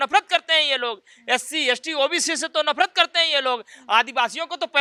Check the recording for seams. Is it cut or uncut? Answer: uncut